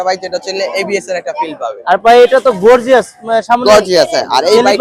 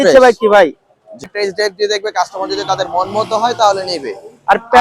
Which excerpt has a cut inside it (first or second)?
second